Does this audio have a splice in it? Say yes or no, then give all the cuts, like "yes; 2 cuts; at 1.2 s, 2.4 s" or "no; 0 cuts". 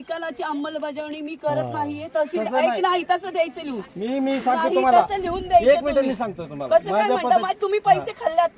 no; 0 cuts